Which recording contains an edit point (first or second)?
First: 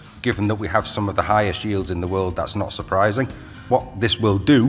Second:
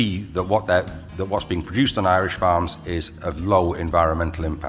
first